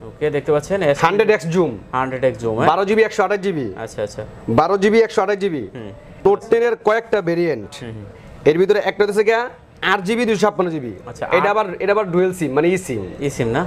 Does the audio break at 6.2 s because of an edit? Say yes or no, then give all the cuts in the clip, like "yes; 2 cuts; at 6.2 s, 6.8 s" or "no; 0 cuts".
yes; 1 cut; at 6.2 s